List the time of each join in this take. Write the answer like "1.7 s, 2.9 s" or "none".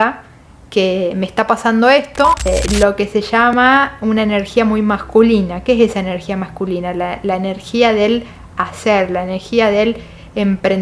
2.5 s